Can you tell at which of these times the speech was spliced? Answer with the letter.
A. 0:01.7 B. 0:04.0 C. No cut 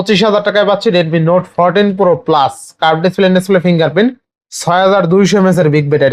C